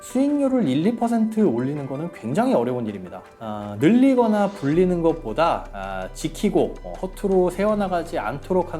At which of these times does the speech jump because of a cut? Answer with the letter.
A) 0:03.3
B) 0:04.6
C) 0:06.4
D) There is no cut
A